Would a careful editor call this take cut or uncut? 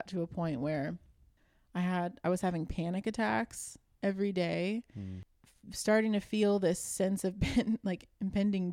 uncut